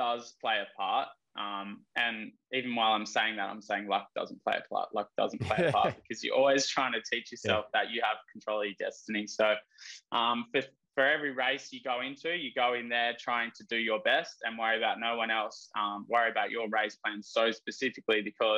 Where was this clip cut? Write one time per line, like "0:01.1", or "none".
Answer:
none